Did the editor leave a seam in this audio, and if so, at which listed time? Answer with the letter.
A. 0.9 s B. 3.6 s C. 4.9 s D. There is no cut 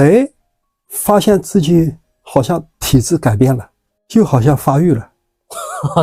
D